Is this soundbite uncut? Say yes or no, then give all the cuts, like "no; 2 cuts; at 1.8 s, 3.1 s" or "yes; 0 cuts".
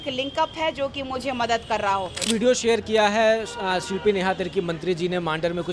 no; 1 cut; at 2.2 s